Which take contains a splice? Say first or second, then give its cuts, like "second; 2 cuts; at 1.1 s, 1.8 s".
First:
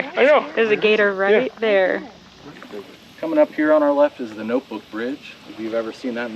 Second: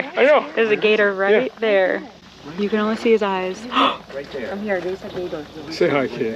first; 1 cut; at 2.4 s